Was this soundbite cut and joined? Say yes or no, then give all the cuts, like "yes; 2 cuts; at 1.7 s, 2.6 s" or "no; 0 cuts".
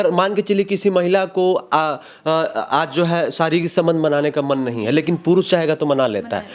no; 0 cuts